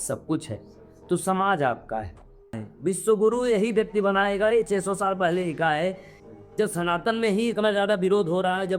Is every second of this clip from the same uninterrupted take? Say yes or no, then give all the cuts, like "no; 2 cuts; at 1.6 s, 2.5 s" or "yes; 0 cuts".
no; 2 cuts; at 2.7 s, 6.1 s